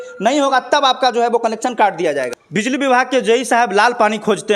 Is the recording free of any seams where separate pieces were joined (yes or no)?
no